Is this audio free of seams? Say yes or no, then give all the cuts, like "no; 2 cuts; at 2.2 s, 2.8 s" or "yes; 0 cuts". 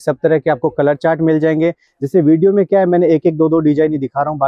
yes; 0 cuts